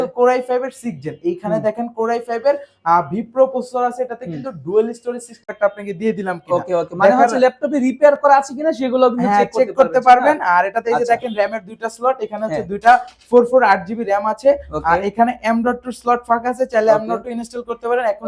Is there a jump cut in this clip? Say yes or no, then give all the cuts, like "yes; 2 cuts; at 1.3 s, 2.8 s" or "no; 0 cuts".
yes; 1 cut; at 5.5 s